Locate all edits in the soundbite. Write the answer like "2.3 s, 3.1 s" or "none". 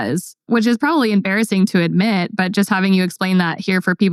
none